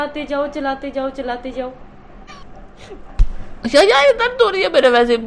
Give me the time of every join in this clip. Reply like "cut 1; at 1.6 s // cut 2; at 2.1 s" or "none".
cut 1; at 2.3 s

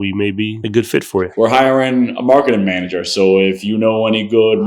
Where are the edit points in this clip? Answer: cut 1; at 1.3 s

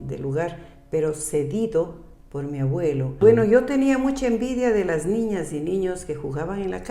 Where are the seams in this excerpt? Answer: cut 1; at 3.1 s

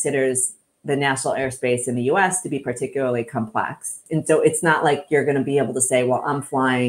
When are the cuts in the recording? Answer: cut 1; at 4.0 s

